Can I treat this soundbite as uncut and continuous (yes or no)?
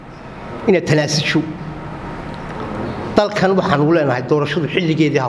yes